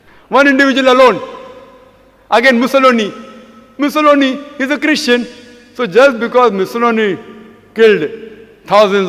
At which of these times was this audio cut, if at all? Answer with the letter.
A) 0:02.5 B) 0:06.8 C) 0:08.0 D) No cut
D